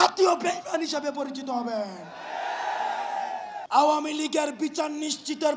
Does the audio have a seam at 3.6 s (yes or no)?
yes